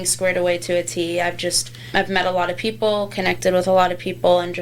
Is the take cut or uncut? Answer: cut